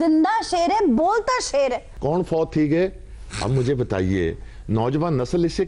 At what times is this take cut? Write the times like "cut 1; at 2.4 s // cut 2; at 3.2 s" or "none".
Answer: cut 1; at 1.9 s